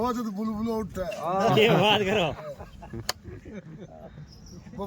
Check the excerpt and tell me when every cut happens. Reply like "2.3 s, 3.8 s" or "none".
none